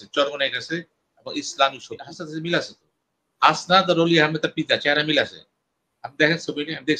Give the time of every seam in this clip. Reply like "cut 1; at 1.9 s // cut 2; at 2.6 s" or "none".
cut 1; at 2.1 s